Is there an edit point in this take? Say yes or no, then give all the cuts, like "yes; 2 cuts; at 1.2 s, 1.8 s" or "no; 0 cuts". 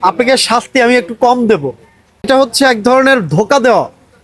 yes; 1 cut; at 2.2 s